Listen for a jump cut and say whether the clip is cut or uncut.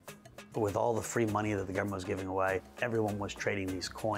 cut